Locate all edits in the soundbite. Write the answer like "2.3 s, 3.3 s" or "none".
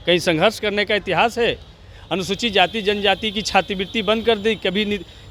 none